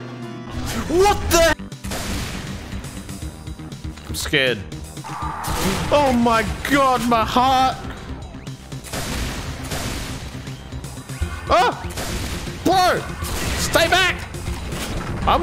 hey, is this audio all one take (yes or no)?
no